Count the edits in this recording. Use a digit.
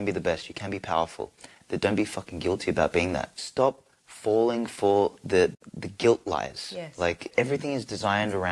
3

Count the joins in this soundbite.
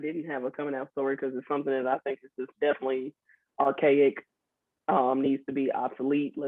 0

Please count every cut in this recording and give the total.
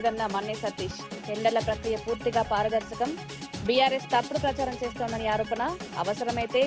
0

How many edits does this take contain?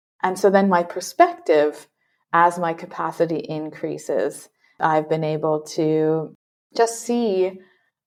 0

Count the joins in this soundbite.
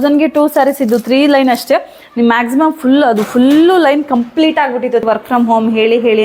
1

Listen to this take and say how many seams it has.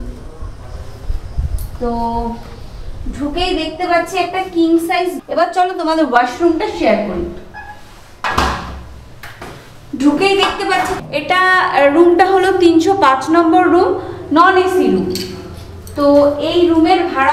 2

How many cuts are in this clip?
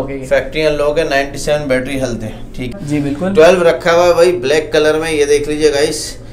1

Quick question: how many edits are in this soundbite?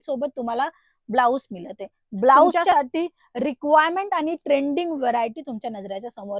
1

